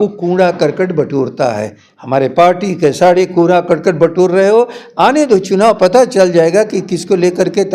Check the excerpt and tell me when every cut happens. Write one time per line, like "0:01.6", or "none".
none